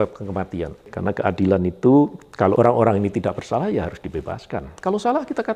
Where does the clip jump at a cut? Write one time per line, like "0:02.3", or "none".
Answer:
0:00.9
0:02.6
0:04.7